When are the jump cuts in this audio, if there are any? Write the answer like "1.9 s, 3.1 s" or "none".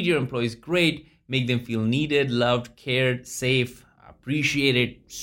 none